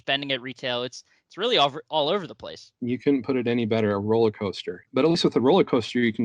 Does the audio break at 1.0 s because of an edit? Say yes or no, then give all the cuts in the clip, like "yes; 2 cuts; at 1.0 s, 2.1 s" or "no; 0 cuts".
no; 2 cuts; at 2.7 s, 4.8 s